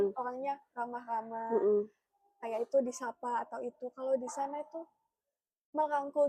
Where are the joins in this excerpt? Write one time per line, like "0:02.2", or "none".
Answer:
none